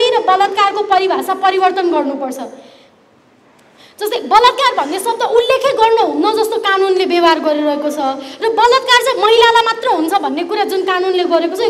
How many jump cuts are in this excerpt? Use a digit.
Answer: 0